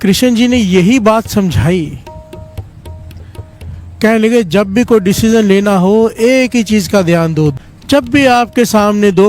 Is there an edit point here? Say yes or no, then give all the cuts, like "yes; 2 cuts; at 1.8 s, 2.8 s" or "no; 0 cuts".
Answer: yes; 1 cut; at 7.5 s